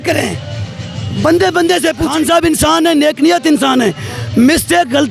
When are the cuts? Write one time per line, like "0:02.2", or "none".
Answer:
0:02.1

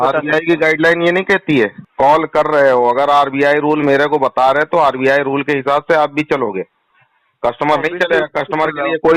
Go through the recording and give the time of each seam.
0:01.9

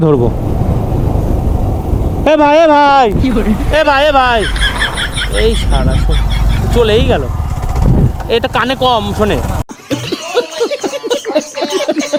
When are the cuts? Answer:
none

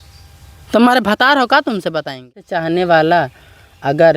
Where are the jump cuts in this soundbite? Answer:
0:02.5

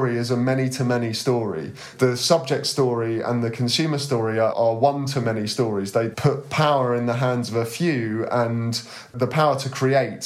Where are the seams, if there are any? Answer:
0:04.5
0:06.1
0:09.1

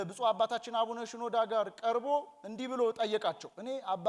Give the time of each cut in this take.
none

